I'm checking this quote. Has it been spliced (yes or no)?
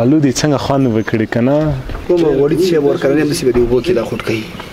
yes